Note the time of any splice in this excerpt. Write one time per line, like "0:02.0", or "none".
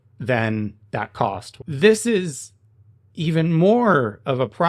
0:01.5